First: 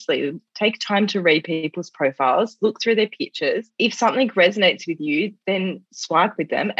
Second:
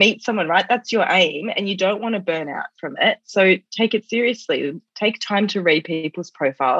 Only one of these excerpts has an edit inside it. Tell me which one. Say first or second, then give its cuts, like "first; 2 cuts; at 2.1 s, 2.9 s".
first; 1 cut; at 3.7 s